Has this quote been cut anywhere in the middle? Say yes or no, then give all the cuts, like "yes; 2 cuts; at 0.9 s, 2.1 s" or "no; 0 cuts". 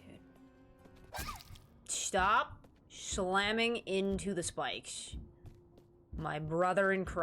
no; 0 cuts